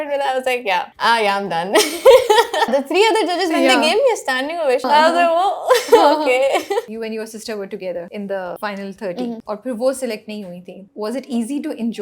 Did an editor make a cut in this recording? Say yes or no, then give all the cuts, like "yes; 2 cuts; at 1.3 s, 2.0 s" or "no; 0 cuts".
yes; 7 cuts; at 0.9 s, 2.7 s, 4.8 s, 6.9 s, 8.4 s, 9.4 s, 10.8 s